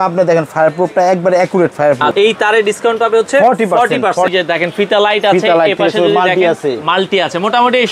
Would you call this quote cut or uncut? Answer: cut